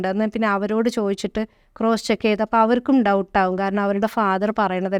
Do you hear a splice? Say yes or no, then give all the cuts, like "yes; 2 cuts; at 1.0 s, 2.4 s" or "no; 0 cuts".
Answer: no; 0 cuts